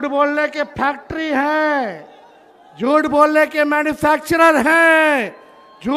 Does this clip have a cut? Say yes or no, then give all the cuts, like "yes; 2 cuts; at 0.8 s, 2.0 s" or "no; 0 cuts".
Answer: no; 0 cuts